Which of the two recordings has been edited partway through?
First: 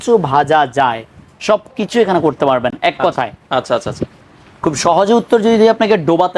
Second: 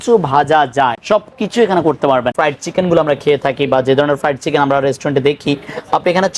second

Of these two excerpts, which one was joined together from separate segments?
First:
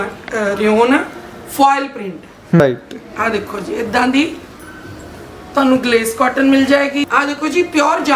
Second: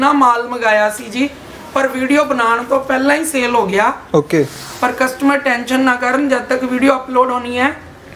first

